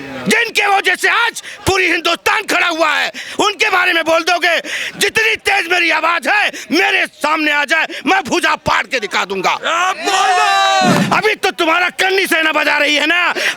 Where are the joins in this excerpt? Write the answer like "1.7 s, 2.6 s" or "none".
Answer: 11.0 s